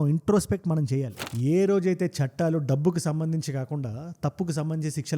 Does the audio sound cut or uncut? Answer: cut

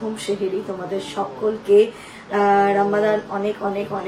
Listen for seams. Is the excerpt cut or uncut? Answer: uncut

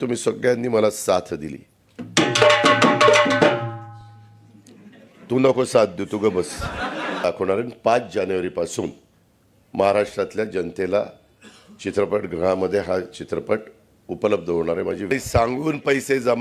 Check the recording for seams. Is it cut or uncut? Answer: cut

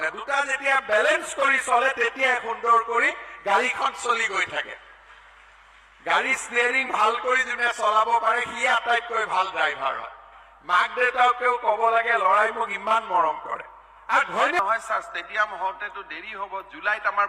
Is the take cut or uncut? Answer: cut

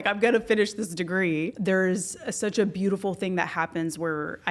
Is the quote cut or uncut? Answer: cut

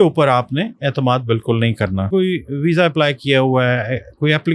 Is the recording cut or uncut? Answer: cut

